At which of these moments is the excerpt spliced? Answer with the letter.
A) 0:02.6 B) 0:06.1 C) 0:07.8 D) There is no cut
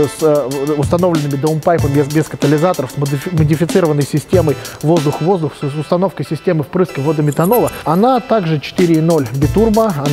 C